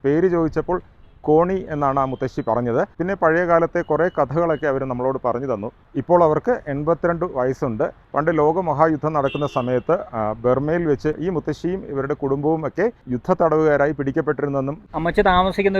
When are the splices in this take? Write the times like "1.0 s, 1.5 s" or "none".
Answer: 5.8 s, 8.0 s, 14.8 s